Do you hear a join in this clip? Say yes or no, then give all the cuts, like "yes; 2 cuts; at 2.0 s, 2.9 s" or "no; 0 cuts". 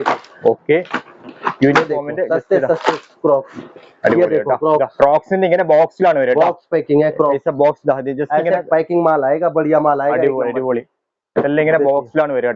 no; 0 cuts